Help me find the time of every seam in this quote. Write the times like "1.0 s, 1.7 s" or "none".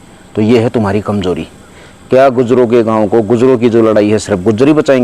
none